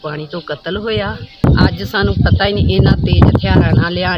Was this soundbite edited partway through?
yes; 1 cut; at 1.4 s

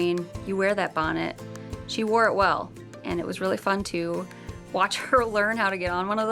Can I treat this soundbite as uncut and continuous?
yes; 0 cuts

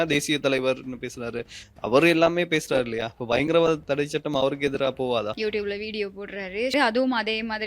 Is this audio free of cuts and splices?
no; 2 cuts; at 5.3 s, 6.7 s

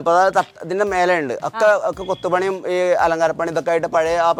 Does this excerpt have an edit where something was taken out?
no; 0 cuts

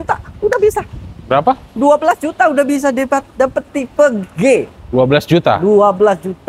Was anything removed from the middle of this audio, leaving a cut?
no; 0 cuts

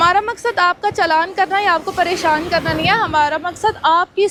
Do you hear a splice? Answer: no; 0 cuts

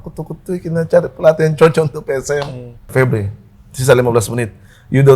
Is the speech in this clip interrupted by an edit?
yes; 1 cut; at 2.9 s

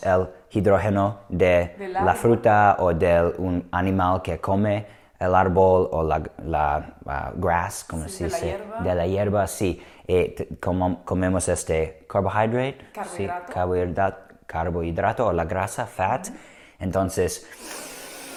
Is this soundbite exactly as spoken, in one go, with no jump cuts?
yes; 0 cuts

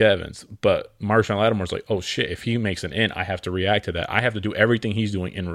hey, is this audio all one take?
yes; 0 cuts

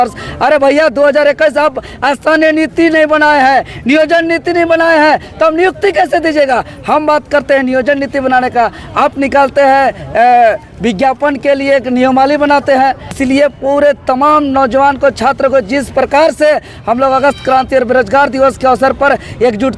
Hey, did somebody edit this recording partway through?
yes; 1 cut; at 13.1 s

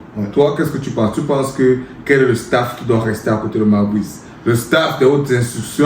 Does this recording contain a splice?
no; 0 cuts

